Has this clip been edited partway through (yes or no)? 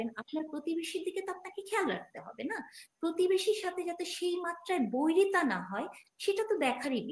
no